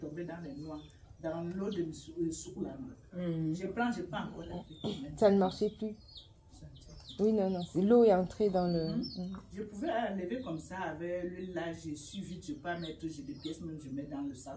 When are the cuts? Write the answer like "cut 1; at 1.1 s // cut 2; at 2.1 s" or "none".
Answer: none